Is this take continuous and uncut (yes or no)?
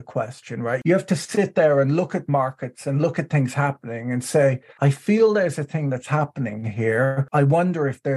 no